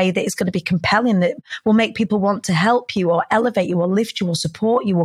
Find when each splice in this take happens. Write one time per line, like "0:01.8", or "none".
none